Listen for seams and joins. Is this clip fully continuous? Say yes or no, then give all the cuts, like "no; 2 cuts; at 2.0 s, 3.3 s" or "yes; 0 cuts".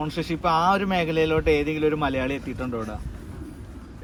yes; 0 cuts